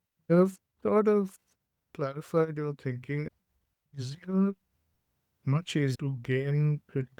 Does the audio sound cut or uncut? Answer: cut